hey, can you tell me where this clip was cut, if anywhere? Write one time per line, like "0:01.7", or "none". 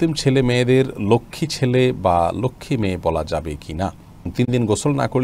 0:04.3